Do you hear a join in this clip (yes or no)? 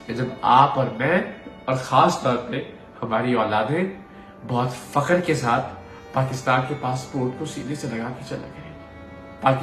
no